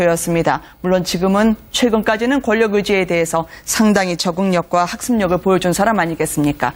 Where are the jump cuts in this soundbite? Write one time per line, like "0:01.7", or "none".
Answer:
none